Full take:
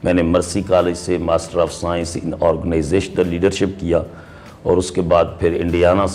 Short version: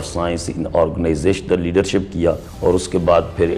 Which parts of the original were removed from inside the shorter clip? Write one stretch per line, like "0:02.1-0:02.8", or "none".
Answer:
0:04.2-0:04.5